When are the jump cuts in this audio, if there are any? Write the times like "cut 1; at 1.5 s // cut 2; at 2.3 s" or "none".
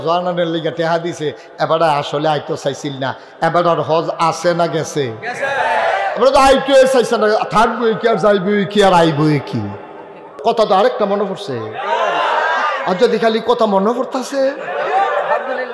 cut 1; at 10.4 s